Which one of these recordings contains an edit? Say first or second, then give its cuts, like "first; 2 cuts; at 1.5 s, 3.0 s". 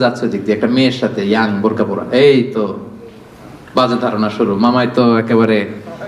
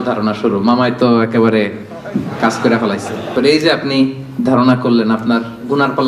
second; 1 cut; at 3.3 s